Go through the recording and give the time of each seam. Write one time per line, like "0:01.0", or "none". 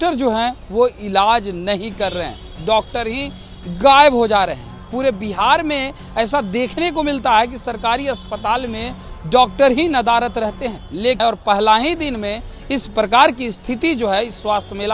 0:11.2